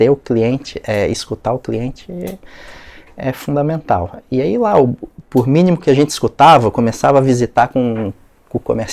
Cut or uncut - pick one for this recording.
uncut